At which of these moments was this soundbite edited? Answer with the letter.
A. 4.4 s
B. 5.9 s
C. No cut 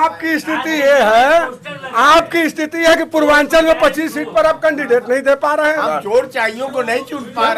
B